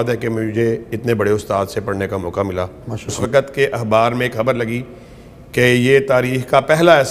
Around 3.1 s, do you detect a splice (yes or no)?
yes